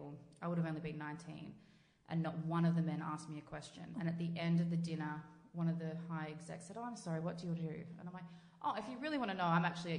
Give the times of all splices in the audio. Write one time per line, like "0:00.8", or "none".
0:03.9